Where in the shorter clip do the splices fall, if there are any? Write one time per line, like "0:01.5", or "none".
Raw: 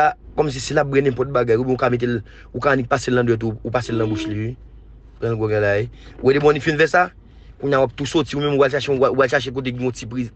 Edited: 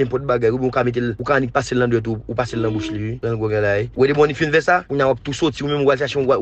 0:01.2
0:03.1
0:03.9
0:04.9